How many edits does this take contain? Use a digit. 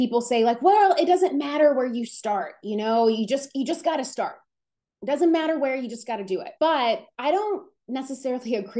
0